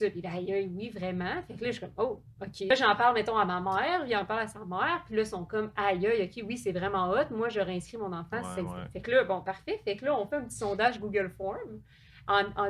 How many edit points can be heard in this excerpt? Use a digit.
1